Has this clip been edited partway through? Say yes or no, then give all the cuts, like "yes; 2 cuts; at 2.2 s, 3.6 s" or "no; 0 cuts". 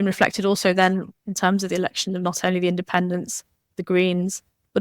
yes; 1 cut; at 1.2 s